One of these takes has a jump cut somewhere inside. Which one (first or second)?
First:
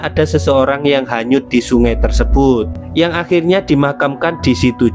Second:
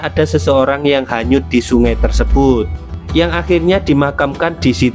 first